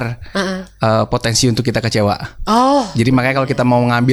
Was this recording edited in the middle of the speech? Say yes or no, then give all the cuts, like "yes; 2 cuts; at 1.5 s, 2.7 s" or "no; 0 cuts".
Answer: no; 0 cuts